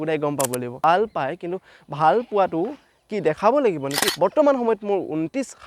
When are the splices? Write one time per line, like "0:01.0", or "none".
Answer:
0:00.8
0:04.1